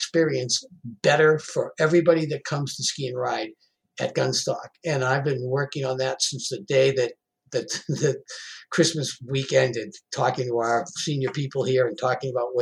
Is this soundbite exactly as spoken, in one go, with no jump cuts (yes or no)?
yes